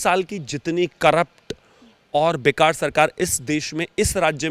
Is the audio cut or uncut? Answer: uncut